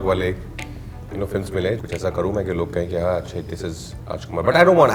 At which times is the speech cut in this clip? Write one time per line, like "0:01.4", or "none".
0:01.8